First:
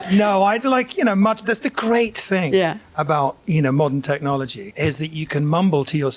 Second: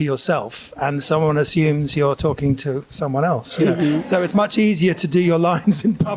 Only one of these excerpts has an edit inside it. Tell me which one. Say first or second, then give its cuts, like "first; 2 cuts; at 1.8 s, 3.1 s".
first; 1 cut; at 4.6 s